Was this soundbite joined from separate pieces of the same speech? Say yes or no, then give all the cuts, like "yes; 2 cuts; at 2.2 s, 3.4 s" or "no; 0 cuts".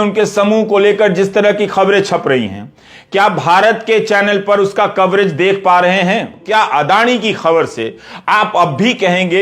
yes; 1 cut; at 6.4 s